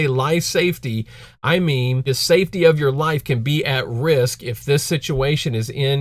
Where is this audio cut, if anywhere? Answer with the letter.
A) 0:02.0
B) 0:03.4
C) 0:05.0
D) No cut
A